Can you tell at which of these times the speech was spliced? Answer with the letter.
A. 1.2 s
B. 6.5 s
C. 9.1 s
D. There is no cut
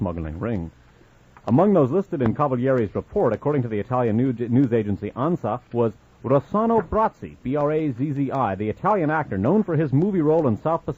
C